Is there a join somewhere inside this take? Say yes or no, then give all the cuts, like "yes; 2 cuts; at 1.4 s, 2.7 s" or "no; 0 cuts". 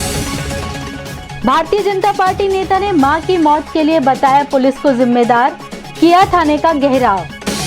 yes; 1 cut; at 1.2 s